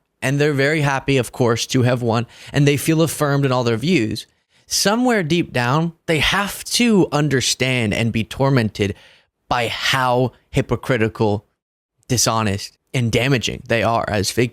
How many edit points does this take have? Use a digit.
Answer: 2